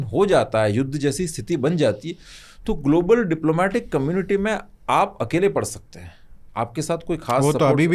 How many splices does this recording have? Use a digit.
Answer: 0